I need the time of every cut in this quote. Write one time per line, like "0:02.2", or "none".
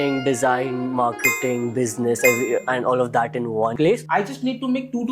0:03.7